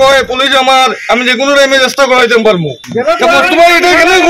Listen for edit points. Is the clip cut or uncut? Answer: cut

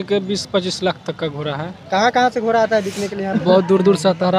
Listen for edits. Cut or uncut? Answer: uncut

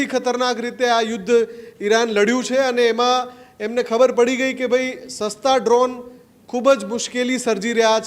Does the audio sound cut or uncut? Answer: uncut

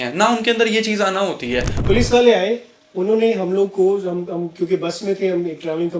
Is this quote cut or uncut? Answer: cut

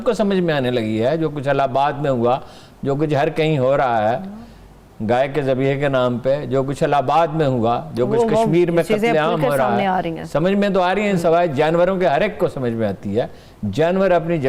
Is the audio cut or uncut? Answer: uncut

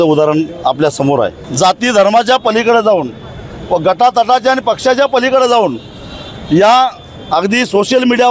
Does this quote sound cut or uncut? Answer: cut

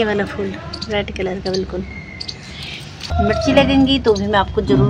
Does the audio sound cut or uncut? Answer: cut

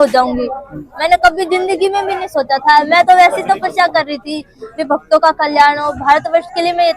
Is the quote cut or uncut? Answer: uncut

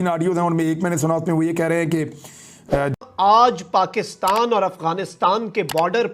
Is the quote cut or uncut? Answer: cut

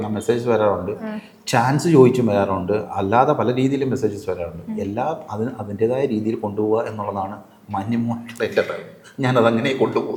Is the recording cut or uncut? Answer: uncut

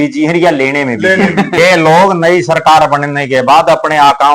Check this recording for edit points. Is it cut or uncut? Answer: cut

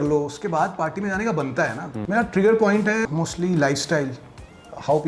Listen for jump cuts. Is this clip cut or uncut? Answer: cut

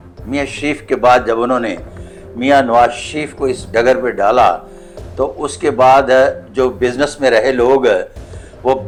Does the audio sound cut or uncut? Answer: uncut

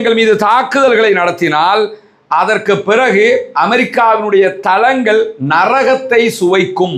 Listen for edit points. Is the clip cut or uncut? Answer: uncut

